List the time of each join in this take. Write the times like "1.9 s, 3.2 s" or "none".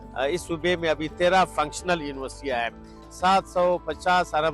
3.0 s